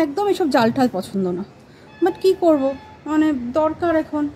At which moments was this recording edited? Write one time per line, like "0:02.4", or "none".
none